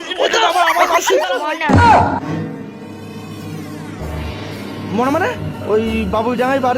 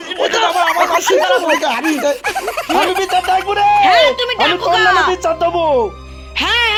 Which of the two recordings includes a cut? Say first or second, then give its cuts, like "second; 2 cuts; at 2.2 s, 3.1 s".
first; 2 cuts; at 1.4 s, 5.5 s